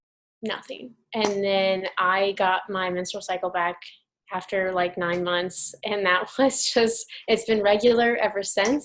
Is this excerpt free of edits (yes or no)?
yes